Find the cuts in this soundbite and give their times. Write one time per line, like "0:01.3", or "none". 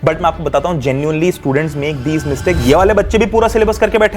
0:02.6